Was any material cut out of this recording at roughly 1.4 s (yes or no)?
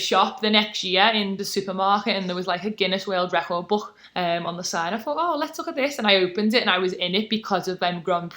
yes